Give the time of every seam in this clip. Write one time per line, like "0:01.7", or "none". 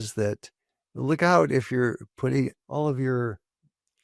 0:02.6